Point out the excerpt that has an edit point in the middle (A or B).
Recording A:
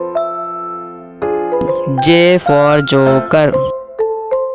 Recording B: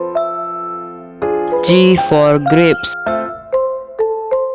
A